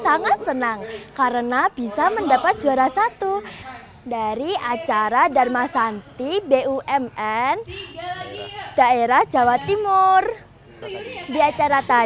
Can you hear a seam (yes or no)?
no